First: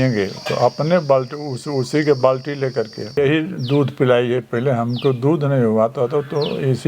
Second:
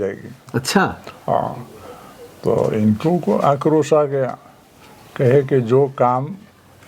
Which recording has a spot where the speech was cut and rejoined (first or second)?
first